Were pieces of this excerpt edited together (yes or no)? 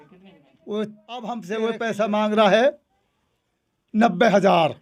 yes